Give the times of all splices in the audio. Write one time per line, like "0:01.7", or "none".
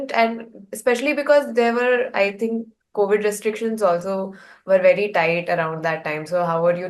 none